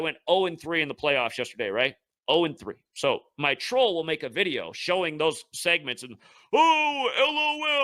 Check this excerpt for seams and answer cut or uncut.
uncut